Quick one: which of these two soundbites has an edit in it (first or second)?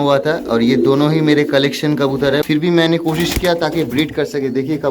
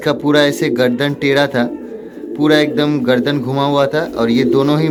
first